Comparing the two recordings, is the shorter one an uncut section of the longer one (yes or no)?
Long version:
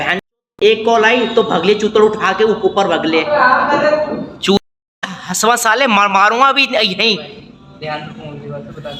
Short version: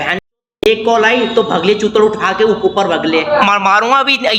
no